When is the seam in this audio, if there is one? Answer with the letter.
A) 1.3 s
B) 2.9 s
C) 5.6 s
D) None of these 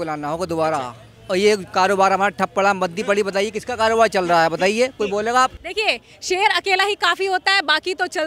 C